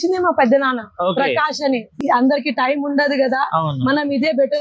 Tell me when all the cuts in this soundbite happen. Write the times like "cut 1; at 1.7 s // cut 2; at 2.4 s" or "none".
cut 1; at 1.9 s